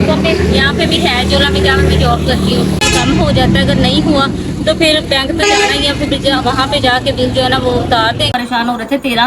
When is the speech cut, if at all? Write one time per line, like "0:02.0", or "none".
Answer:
0:02.8
0:08.3